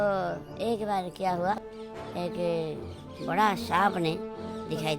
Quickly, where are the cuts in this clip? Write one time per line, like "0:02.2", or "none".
0:01.5